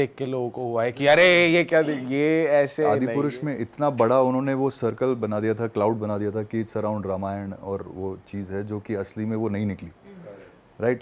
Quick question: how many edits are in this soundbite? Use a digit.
1